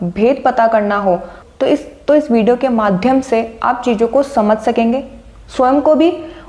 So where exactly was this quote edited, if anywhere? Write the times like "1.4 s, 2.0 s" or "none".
none